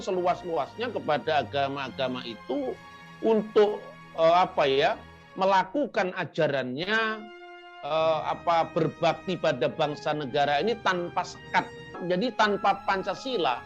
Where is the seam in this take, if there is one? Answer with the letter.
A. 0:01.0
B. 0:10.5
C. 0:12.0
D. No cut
C